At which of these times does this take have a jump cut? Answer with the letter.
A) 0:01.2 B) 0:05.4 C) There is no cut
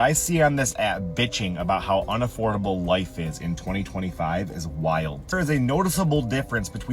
B